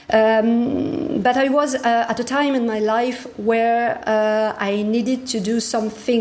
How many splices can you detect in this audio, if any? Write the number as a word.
zero